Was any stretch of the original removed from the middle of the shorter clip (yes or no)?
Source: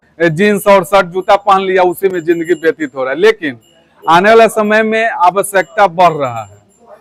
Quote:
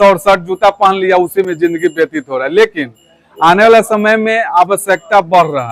no